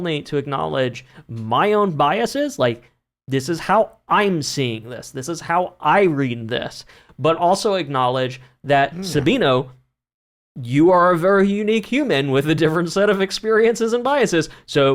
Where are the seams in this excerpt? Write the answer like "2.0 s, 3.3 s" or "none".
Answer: none